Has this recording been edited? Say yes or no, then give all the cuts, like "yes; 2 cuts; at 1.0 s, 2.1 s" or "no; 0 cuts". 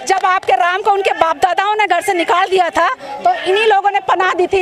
no; 0 cuts